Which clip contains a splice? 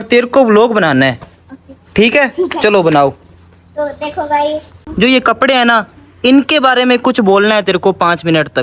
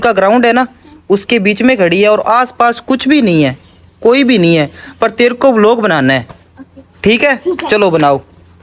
first; 1 cut; at 4.8 s

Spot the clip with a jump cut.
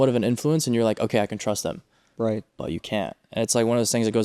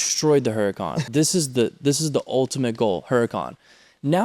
second; 1 cut; at 1.0 s

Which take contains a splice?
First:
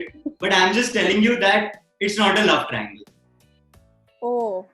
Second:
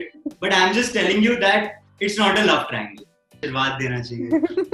second; 1 cut; at 3.4 s

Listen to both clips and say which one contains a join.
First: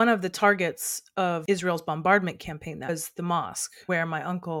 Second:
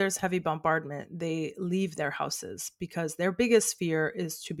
first; 3 cuts; at 1.4 s, 2.9 s, 3.7 s

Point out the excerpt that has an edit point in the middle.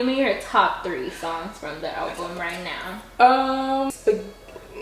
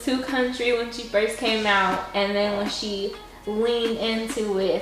first; 1 cut; at 3.9 s

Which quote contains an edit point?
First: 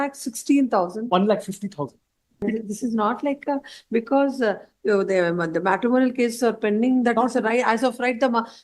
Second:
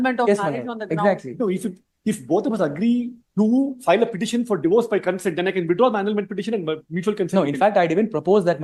first; 1 cut; at 2.4 s

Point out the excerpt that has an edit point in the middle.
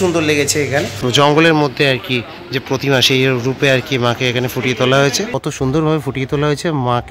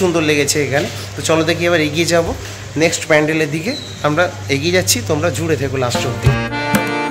first; 2 cuts; at 1.0 s, 5.7 s

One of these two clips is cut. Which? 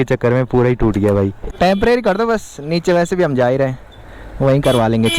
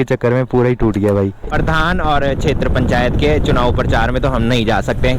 second; 1 cut; at 1.5 s

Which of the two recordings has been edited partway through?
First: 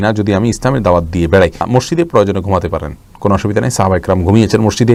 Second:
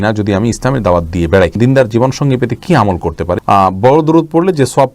second; 2 cuts; at 1.6 s, 3.4 s

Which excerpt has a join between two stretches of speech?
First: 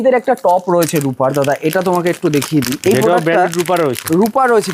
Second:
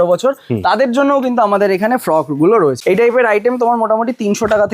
second; 1 cut; at 2.8 s

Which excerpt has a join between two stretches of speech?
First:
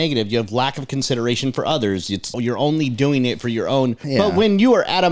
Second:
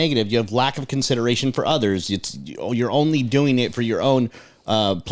first; 2 cuts; at 2.3 s, 4.0 s

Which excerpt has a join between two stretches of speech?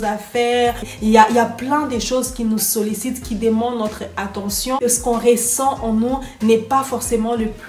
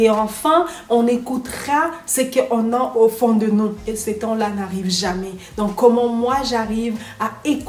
first; 2 cuts; at 0.9 s, 4.8 s

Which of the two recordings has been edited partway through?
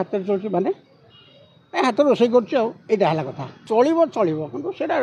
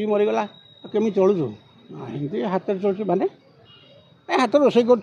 first; 1 cut; at 3.6 s

